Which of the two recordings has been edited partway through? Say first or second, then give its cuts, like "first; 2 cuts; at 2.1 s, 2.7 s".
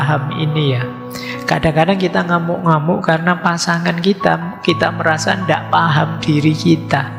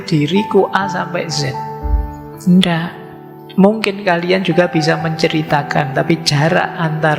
second; 1 cut; at 3.4 s